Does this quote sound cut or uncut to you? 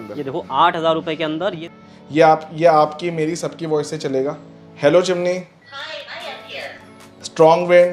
cut